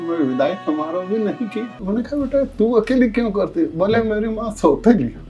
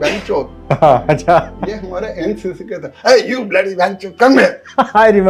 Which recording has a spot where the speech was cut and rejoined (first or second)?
first